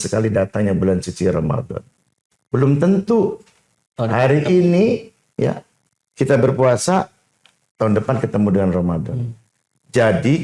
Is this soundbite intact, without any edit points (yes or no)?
yes